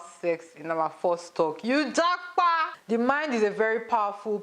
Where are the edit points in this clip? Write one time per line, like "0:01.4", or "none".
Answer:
0:02.7